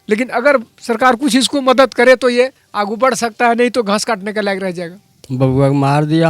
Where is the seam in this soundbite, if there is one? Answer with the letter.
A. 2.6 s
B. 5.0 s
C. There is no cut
B